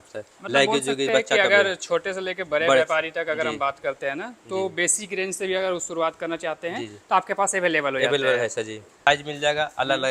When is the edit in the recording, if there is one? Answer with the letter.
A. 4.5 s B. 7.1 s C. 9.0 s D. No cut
C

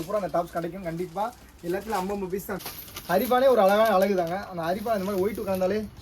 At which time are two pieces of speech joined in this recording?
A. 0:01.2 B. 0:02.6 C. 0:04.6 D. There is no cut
B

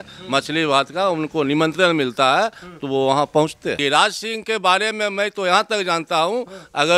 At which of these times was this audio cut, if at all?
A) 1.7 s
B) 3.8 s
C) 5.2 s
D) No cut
B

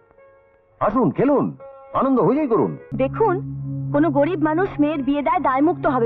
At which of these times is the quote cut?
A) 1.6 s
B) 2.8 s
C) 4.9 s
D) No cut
B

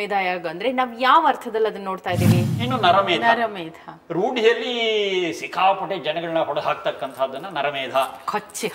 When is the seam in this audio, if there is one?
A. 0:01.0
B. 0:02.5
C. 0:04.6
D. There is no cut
B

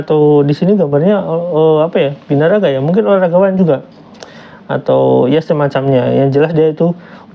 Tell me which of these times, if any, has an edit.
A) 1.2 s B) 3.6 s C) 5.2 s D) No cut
D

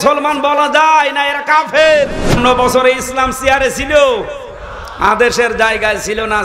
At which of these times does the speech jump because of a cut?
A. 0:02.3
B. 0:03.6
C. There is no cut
A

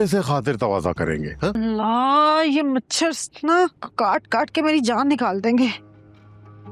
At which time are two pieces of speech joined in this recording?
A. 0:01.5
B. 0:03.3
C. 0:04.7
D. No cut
A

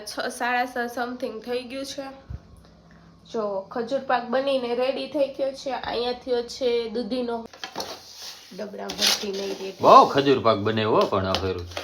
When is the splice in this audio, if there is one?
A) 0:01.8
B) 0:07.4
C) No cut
B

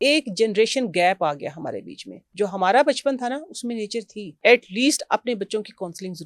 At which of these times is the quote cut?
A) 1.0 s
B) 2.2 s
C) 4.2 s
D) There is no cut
C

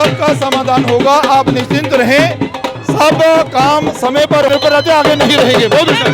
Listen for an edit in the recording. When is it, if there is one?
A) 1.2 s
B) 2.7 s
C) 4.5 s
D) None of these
C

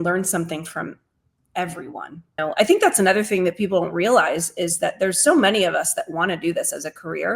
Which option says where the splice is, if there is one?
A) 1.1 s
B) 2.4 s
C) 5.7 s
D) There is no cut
B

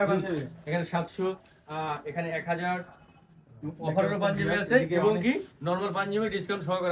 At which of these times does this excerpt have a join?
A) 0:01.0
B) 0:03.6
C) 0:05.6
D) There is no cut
D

